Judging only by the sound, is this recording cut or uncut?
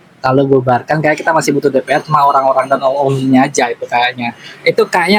uncut